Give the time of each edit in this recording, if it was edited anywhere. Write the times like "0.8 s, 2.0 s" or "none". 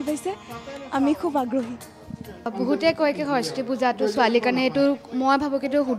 2.5 s